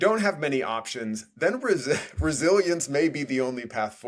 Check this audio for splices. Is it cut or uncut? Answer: uncut